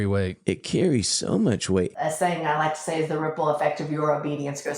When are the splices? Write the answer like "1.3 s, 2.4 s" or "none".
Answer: 1.9 s